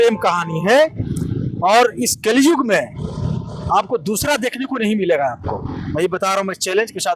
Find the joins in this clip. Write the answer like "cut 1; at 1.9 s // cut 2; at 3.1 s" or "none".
none